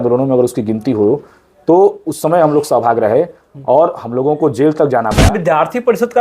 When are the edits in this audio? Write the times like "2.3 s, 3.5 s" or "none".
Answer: 5.2 s